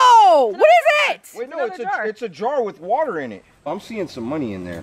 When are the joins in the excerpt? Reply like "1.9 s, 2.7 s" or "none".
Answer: 3.7 s